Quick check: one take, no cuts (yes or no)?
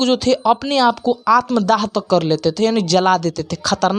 yes